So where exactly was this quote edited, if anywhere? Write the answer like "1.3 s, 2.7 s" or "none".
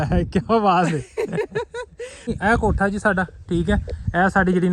2.4 s